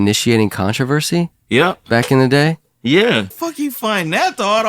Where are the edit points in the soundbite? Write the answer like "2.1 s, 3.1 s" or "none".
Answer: 3.3 s